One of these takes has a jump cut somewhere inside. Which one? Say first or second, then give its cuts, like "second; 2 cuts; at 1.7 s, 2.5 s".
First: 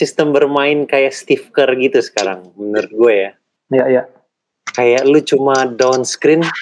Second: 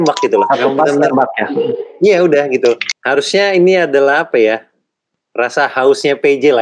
second; 1 cut; at 2.9 s